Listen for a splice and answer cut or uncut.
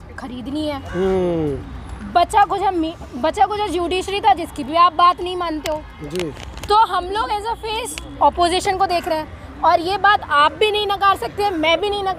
uncut